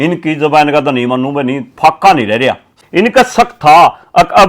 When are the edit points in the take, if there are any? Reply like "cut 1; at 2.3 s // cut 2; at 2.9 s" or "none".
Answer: cut 1; at 2.7 s